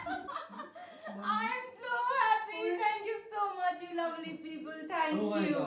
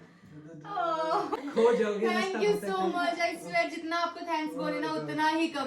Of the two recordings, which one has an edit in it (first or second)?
second